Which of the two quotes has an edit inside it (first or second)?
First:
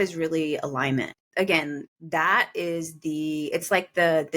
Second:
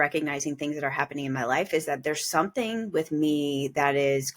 first